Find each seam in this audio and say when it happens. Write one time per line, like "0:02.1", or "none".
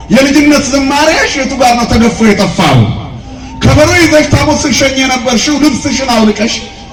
none